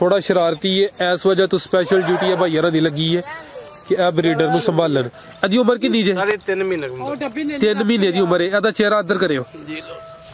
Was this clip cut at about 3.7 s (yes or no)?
no